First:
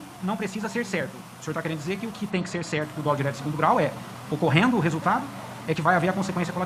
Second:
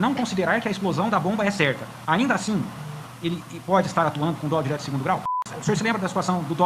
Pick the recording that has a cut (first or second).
second